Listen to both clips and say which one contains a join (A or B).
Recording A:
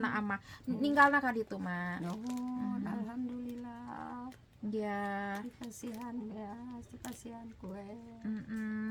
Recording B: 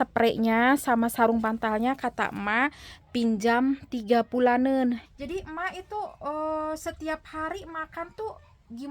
B